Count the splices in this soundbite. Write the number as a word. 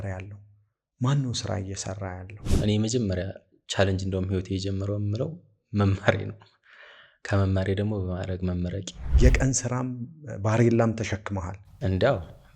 two